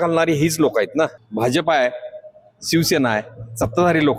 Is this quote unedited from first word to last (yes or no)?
no